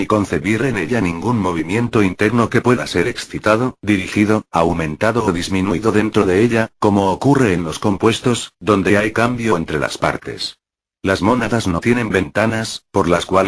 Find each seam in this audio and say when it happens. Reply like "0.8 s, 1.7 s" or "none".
none